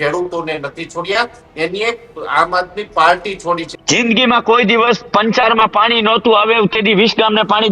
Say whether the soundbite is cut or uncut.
cut